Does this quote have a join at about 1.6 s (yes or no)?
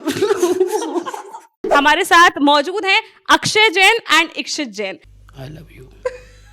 yes